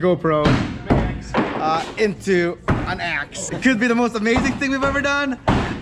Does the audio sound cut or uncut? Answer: cut